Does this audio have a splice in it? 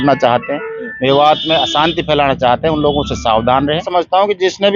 yes; 1 cut; at 3.9 s

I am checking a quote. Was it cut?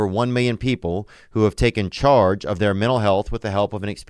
no; 0 cuts

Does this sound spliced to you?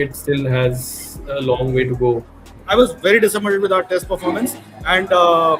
yes; 1 cut; at 2.5 s

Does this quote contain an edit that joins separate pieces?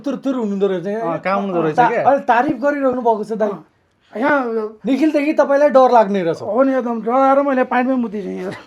no; 0 cuts

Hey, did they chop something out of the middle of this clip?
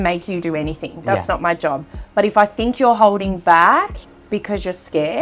no; 0 cuts

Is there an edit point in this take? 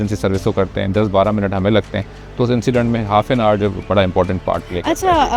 no; 0 cuts

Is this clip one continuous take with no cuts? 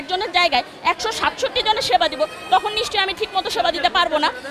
yes; 0 cuts

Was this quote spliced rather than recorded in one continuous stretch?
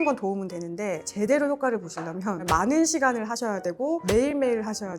yes; 1 cut; at 2.4 s

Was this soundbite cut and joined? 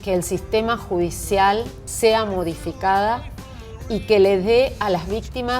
yes; 1 cut; at 1.8 s

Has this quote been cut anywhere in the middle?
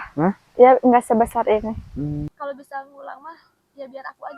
yes; 1 cut; at 2.3 s

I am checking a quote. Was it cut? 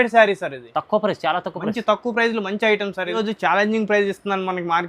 yes; 1 cut; at 3.1 s

